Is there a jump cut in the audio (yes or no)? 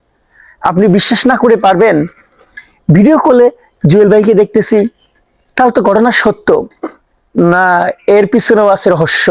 no